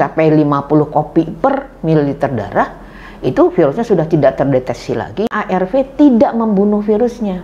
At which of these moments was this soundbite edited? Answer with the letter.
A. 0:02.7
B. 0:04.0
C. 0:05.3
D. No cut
C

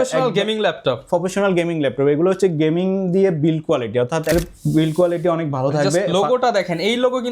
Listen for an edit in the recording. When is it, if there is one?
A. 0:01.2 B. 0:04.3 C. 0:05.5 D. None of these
B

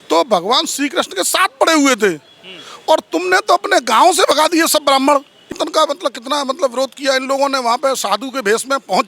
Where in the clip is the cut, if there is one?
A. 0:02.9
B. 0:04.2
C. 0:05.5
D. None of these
C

